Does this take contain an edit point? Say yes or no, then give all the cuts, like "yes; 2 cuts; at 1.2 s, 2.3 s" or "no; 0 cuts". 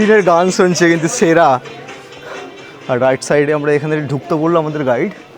no; 0 cuts